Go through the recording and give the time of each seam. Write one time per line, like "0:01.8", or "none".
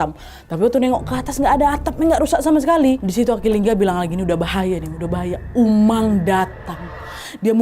0:03.0